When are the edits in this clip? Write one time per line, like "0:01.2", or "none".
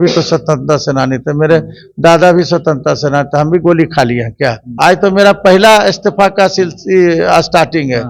0:04.6